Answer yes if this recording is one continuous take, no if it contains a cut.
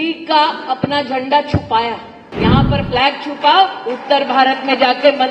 no